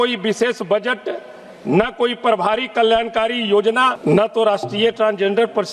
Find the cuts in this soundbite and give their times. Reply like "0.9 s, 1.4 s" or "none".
4.0 s